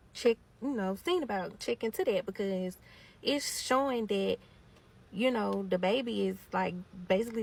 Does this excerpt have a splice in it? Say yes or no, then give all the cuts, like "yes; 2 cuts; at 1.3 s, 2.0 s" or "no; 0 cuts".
no; 0 cuts